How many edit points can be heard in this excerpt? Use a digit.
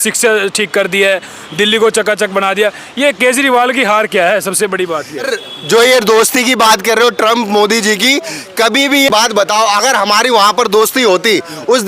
2